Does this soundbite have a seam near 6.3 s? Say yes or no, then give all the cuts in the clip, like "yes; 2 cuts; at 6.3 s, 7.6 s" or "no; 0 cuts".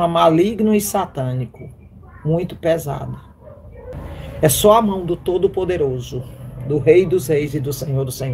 no; 1 cut; at 3.9 s